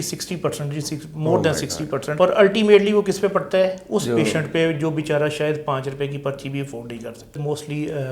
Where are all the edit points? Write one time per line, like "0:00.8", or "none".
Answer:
0:02.1
0:07.4